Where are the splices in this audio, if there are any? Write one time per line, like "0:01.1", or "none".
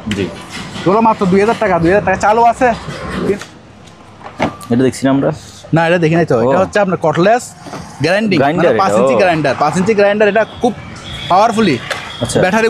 0:03.3